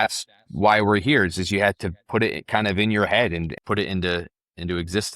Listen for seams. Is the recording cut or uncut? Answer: cut